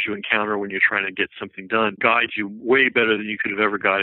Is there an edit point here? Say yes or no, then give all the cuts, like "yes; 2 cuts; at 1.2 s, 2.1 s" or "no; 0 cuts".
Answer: yes; 1 cut; at 2.0 s